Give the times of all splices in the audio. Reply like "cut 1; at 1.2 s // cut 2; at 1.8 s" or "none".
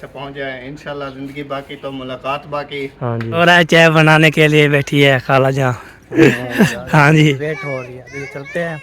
cut 1; at 3.4 s // cut 2; at 7.4 s